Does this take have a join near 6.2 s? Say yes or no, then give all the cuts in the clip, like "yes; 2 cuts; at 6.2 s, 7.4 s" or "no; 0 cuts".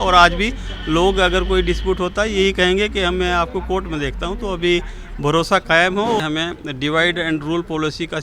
yes; 1 cut; at 6.2 s